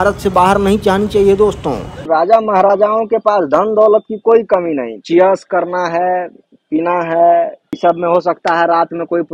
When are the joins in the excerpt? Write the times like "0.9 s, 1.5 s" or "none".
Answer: 1.9 s, 5.0 s, 7.6 s